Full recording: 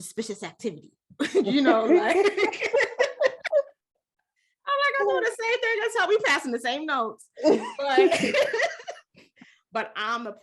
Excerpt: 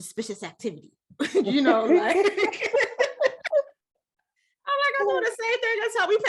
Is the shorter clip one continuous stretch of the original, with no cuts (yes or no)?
yes